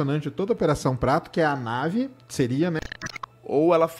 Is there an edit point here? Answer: yes; 1 cut; at 2.8 s

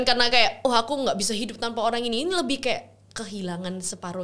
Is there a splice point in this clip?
no; 0 cuts

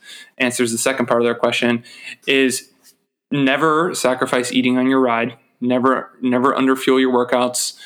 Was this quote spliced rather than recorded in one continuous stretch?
no; 0 cuts

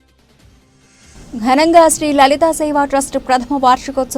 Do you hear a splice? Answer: yes; 1 cut; at 1.0 s

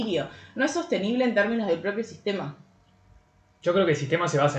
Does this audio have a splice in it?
no; 0 cuts

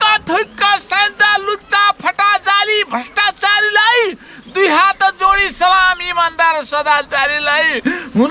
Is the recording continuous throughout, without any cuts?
yes; 0 cuts

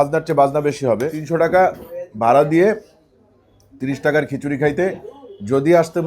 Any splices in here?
yes; 1 cut; at 1.2 s

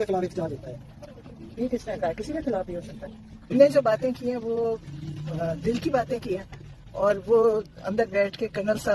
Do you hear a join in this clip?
yes; 1 cut; at 3.5 s

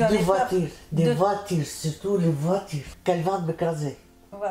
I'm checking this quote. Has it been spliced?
yes; 1 cut; at 2.9 s

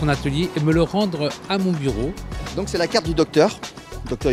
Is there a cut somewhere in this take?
no; 0 cuts

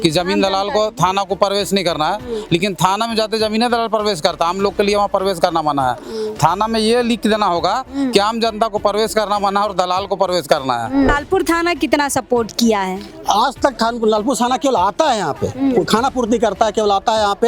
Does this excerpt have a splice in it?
yes; 1 cut; at 11.1 s

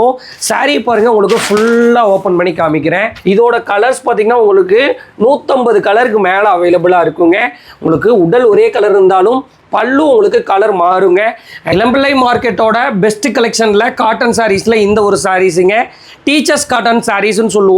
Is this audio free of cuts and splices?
no; 2 cuts; at 3.1 s, 11.7 s

